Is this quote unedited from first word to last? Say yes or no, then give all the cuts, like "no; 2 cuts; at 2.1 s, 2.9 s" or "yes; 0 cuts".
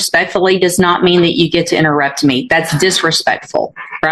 yes; 0 cuts